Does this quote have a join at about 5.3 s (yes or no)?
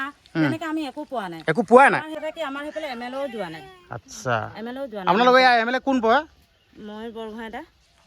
no